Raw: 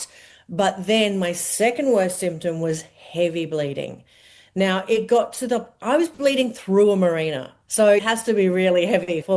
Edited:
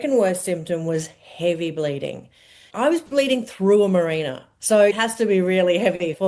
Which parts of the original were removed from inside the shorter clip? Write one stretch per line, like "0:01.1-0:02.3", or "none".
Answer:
0:04.4-0:05.7